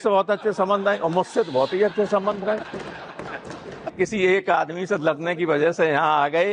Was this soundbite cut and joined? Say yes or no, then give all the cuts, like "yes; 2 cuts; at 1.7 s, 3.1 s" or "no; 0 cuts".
yes; 1 cut; at 3.9 s